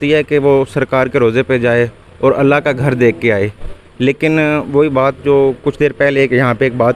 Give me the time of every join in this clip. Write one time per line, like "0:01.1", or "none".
none